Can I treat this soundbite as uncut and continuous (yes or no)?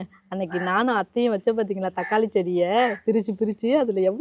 yes